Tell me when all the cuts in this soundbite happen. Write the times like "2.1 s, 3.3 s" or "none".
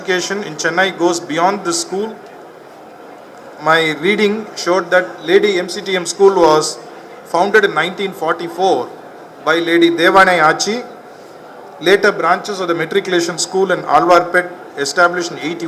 none